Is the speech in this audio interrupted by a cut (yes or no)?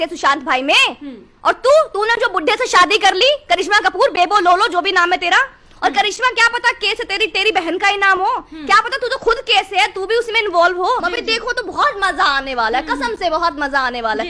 yes